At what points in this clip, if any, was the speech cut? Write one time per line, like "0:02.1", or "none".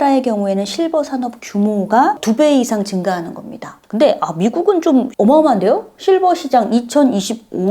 0:02.2